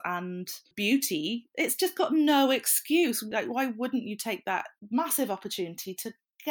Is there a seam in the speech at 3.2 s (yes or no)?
yes